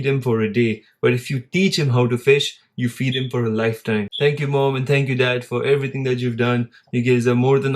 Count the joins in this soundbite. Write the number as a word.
one